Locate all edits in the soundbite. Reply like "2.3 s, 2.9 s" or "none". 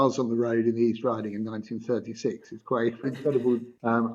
3.2 s

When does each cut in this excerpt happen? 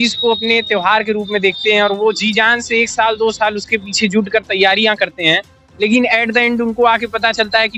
none

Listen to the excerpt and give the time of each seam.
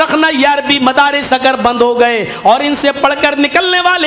none

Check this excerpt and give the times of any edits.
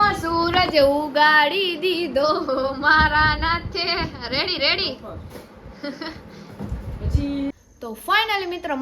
7.5 s

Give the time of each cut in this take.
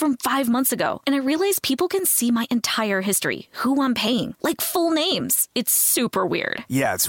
none

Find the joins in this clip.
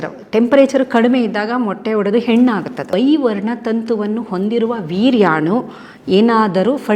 2.8 s

